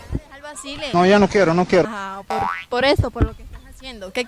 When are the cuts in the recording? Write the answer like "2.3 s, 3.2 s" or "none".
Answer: 1.9 s